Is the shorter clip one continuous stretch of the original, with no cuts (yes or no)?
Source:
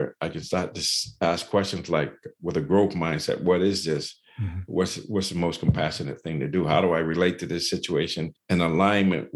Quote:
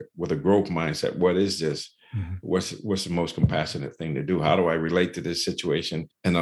yes